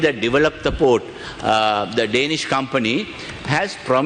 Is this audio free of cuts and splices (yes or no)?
yes